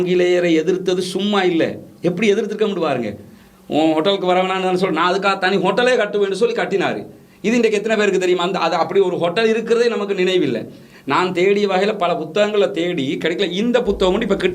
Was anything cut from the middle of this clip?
no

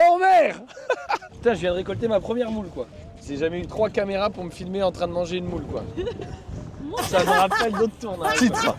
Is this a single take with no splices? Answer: no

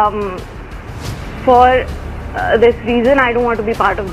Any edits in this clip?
no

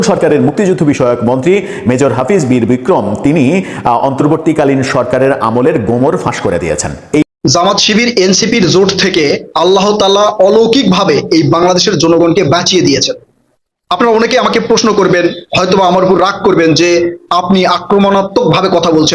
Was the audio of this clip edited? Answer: yes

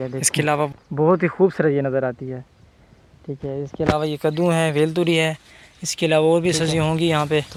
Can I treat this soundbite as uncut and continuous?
yes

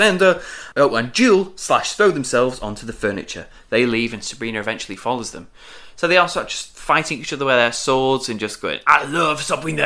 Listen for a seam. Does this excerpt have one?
no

